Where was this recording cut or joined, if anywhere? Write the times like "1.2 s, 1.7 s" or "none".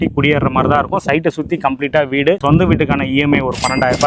2.4 s

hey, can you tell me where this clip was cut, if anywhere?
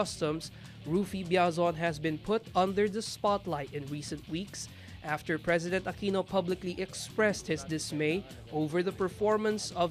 none

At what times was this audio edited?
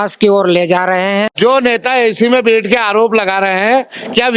1.3 s

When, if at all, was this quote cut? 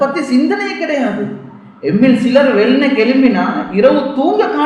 none

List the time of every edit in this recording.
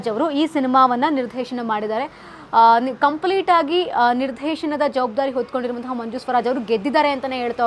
none

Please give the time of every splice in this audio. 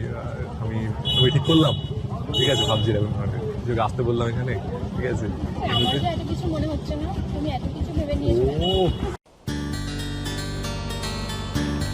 none

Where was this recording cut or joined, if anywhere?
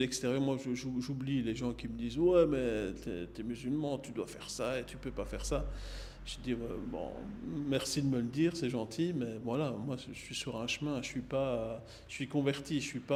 none

